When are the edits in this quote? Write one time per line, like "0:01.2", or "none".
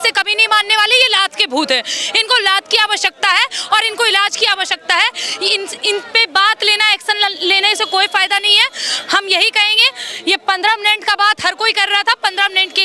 none